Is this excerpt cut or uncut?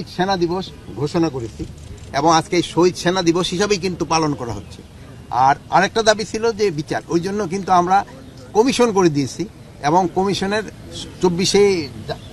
uncut